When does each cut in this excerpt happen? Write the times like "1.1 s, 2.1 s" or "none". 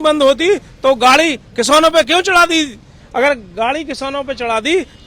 none